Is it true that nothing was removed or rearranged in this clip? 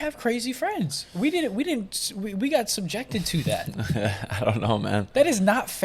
yes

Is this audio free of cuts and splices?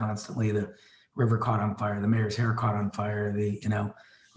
yes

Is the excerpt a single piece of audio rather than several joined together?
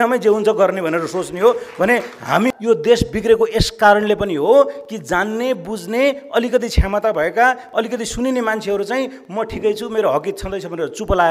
no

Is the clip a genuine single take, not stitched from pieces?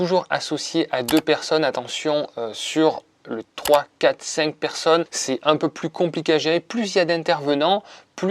yes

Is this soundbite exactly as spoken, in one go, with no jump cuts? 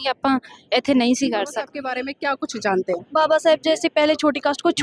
no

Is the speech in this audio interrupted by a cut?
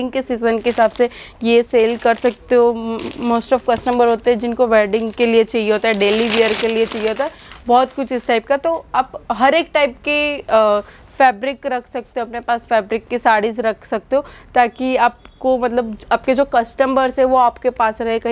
no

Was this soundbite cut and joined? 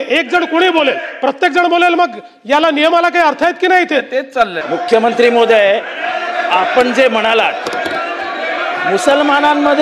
yes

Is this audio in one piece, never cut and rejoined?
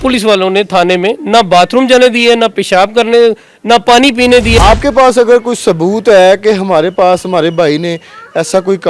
no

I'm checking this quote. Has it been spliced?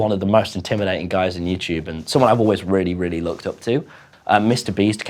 yes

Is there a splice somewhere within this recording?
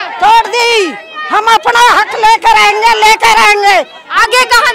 no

